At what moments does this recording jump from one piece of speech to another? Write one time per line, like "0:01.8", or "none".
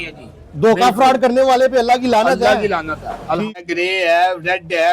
0:03.6